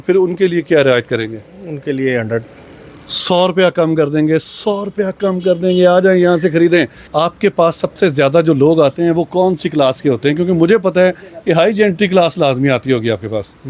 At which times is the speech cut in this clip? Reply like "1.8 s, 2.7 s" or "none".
7.0 s